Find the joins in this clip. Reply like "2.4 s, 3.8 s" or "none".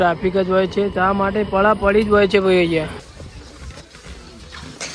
3.0 s